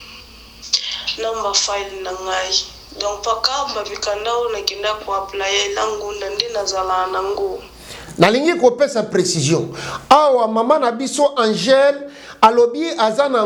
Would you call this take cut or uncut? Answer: uncut